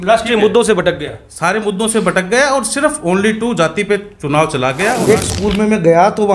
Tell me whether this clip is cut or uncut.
cut